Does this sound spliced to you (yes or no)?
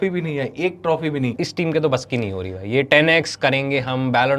yes